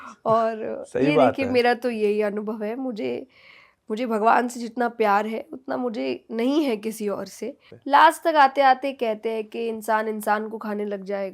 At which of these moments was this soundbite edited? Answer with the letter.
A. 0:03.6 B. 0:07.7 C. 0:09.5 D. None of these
B